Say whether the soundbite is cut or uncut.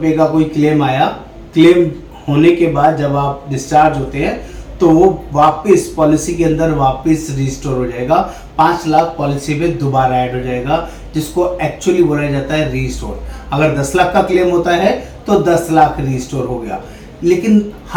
uncut